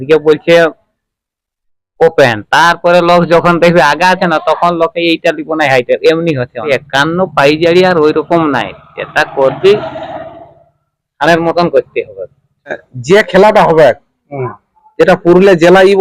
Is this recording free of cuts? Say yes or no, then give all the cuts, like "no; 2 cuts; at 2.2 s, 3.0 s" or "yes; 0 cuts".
no; 2 cuts; at 6.7 s, 12.9 s